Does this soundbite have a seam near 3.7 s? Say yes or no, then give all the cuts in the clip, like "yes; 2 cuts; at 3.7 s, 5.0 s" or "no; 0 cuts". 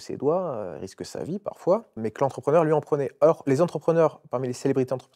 no; 1 cut; at 2.0 s